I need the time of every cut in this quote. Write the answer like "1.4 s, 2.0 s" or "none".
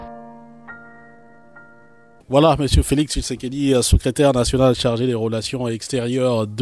2.0 s